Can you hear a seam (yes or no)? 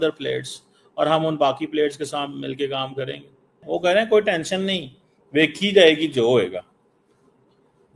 yes